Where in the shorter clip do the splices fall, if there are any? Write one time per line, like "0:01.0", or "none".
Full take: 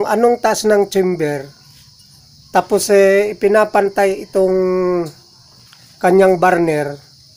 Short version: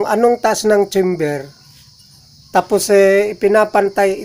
none